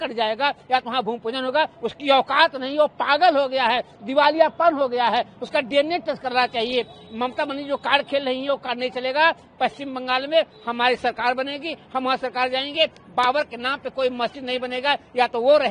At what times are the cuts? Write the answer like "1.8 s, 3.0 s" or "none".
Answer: none